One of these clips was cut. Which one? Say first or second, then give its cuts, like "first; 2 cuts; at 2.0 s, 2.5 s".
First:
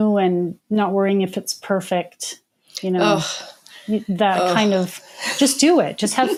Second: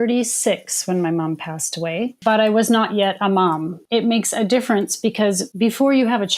second; 3 cuts; at 2.2 s, 3.8 s, 5.5 s